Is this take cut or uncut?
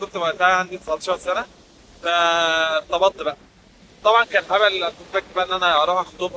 uncut